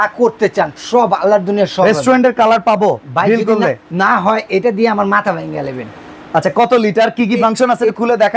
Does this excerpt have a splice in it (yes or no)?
no